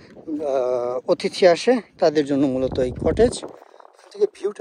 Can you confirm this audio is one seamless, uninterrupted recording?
yes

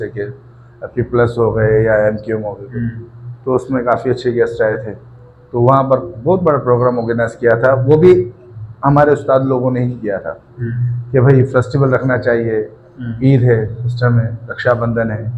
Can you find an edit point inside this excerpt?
no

